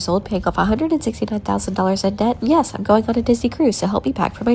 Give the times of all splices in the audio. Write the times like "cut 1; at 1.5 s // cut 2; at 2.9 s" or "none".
none